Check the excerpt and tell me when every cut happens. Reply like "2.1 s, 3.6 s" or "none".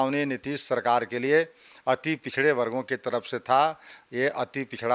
none